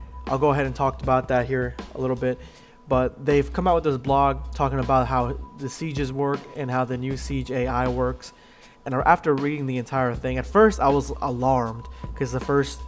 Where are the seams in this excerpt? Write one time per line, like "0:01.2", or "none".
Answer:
0:11.1